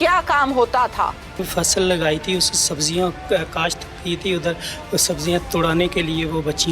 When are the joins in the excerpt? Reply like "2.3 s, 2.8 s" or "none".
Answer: 1.5 s